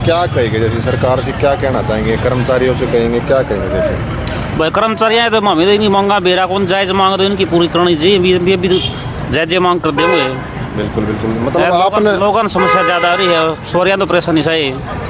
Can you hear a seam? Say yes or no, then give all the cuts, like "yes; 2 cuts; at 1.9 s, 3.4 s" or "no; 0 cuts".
no; 0 cuts